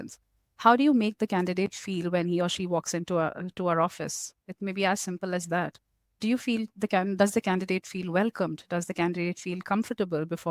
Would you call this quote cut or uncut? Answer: uncut